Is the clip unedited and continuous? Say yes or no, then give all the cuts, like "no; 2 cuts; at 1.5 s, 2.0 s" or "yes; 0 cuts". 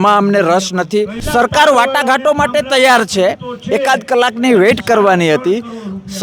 no; 1 cut; at 1.2 s